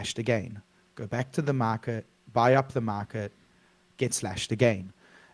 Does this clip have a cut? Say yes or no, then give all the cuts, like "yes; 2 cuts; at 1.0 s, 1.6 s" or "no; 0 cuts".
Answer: no; 0 cuts